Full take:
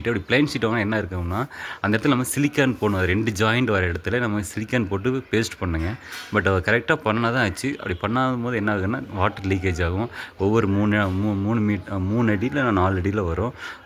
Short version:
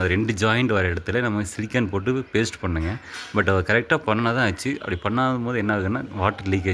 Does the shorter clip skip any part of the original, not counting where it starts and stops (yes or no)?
no